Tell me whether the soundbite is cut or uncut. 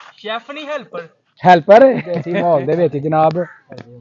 cut